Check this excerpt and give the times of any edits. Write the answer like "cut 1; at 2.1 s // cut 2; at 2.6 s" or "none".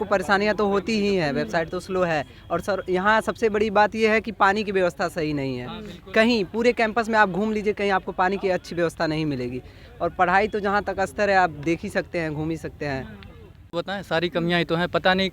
cut 1; at 13.8 s

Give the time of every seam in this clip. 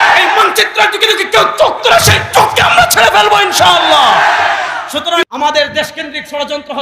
cut 1; at 5.2 s

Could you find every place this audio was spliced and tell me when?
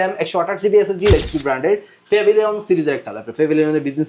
cut 1; at 1.1 s

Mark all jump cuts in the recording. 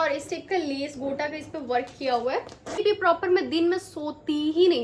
cut 1; at 2.8 s

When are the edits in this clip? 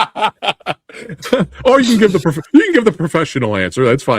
none

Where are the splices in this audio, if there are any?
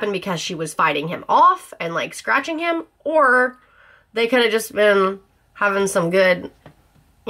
none

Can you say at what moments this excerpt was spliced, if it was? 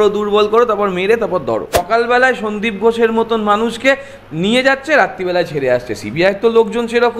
cut 1; at 1.8 s

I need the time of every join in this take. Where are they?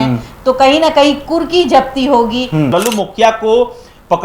cut 1; at 2.7 s

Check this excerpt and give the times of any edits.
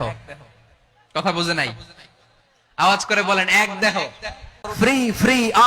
cut 1; at 4.6 s

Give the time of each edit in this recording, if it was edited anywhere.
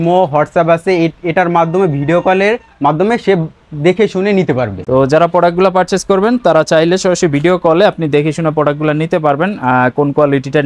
none

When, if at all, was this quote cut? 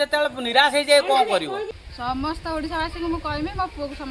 cut 1; at 1.8 s

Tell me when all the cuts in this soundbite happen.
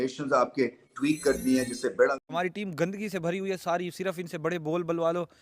cut 1; at 2.2 s

